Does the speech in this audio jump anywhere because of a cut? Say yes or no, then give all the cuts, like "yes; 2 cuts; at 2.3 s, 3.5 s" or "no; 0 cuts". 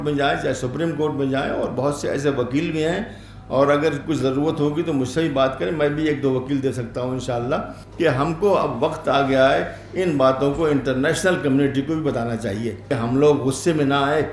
yes; 2 cuts; at 7.8 s, 12.9 s